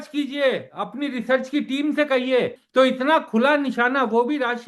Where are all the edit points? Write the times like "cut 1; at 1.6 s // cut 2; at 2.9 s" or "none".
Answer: cut 1; at 2.6 s